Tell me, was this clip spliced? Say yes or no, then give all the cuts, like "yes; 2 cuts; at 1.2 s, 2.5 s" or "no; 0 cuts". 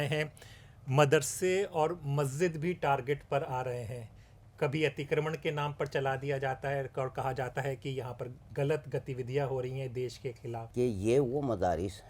yes; 1 cut; at 10.6 s